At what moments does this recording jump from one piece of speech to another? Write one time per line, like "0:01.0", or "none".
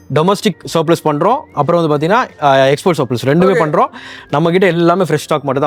none